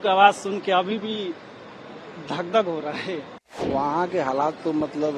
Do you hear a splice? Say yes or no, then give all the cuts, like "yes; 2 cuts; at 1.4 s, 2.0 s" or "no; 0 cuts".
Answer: yes; 1 cut; at 3.6 s